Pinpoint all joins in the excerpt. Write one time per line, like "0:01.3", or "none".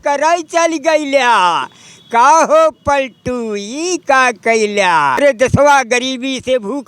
0:05.2